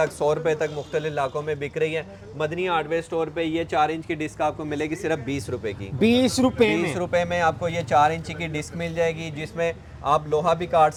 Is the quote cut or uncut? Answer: uncut